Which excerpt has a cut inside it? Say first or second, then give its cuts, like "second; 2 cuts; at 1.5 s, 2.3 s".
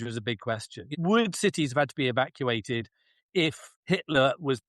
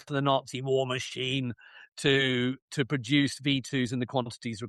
first; 2 cuts; at 1.0 s, 3.7 s